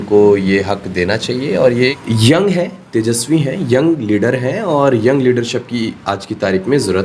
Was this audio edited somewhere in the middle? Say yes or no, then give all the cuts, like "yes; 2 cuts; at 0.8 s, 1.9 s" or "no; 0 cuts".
yes; 1 cut; at 2.0 s